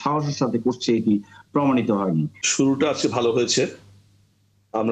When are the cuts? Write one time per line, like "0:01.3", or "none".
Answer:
0:02.4

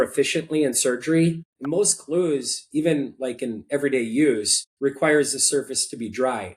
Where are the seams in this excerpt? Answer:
0:01.5

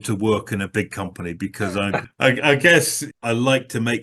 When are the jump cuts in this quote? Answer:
0:02.1
0:03.0

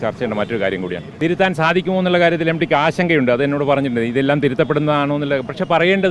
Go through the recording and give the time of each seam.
0:01.1

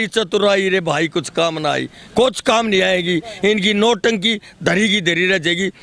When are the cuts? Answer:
none

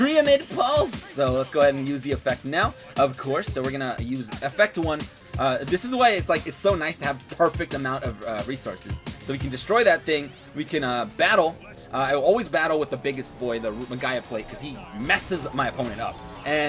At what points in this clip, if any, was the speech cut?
0:05.2

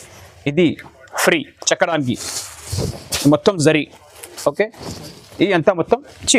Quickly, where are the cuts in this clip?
none

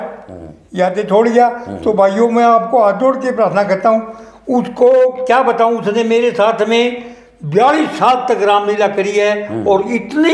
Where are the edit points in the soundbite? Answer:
none

